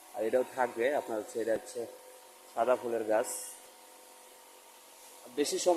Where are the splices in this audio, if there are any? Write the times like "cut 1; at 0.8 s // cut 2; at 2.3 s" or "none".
none